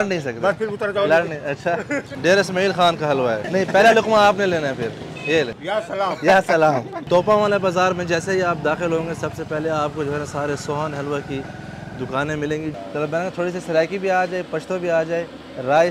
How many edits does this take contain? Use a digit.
5